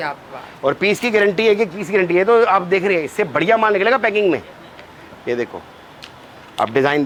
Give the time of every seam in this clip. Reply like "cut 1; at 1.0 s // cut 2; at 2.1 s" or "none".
none